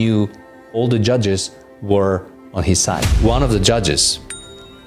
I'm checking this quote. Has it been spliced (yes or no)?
yes